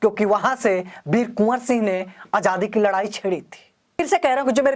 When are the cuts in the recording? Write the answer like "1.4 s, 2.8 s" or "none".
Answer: 3.8 s